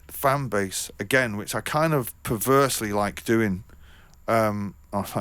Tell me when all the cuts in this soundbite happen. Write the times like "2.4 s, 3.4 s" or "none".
none